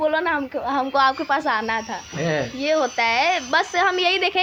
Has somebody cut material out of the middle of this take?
no; 0 cuts

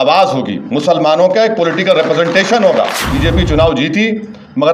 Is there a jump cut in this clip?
yes; 1 cut; at 3.0 s

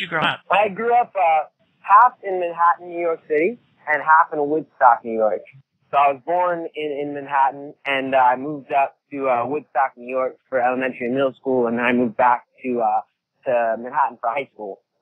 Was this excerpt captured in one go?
no; 1 cut; at 3.0 s

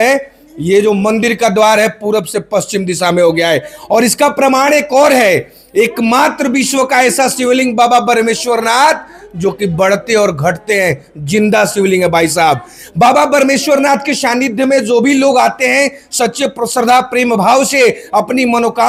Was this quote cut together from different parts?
no; 0 cuts

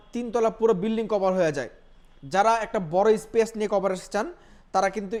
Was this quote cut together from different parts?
no; 0 cuts

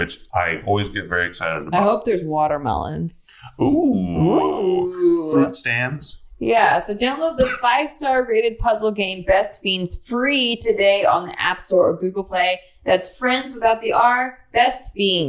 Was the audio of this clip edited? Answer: no; 0 cuts

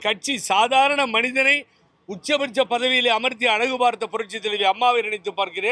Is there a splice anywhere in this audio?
no; 0 cuts

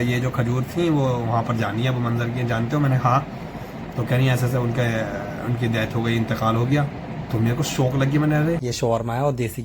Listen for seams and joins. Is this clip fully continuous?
no; 1 cut; at 8.6 s

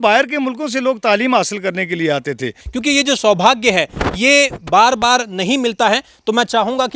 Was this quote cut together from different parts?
yes; 1 cut; at 2.7 s

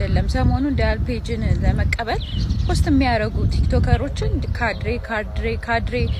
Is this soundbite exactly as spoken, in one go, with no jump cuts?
yes; 0 cuts

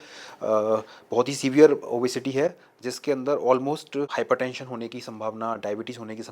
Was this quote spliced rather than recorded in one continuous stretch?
yes; 1 cut; at 4.1 s

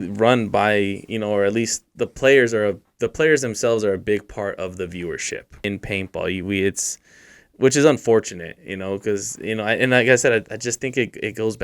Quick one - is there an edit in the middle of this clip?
yes; 1 cut; at 5.6 s

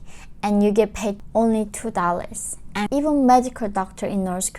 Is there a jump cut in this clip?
yes; 2 cuts; at 1.2 s, 2.8 s

